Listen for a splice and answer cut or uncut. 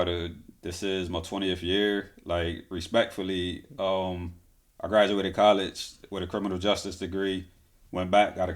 uncut